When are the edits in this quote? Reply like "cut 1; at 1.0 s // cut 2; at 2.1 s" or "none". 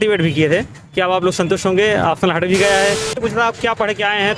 cut 1; at 3.1 s